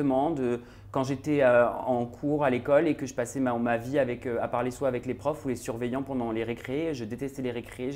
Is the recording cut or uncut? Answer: uncut